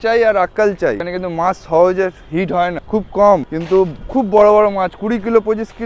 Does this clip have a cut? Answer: yes; 3 cuts; at 1.1 s, 2.8 s, 3.5 s

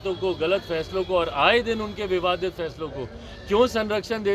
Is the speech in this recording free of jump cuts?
yes; 0 cuts

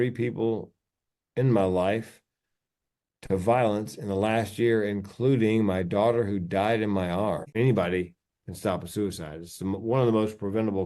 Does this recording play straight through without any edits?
no; 1 cut; at 7.5 s

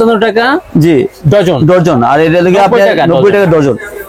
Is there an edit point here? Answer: no; 0 cuts

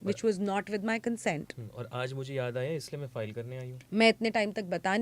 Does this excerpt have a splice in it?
no; 0 cuts

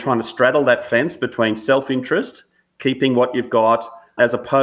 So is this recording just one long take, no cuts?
yes; 0 cuts

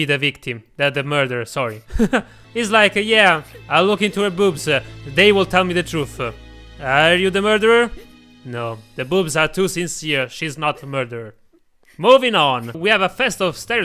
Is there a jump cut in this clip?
yes; 2 cuts; at 2.4 s, 12.8 s

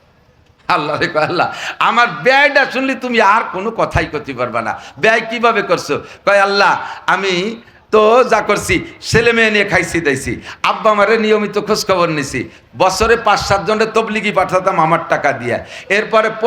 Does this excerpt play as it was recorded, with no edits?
yes; 0 cuts

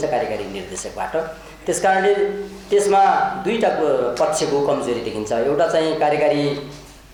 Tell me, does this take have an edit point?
no; 0 cuts

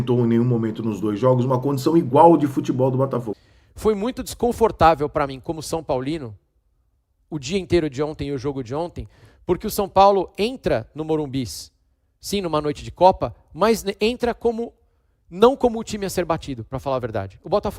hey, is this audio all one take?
no; 1 cut; at 3.4 s

